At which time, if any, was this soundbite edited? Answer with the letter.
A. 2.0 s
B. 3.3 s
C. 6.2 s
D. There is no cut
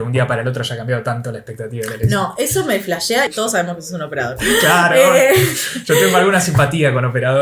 B